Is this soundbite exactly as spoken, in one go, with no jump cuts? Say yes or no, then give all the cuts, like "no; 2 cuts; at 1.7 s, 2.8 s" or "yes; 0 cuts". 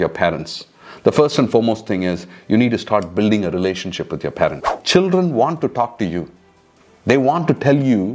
no; 1 cut; at 4.6 s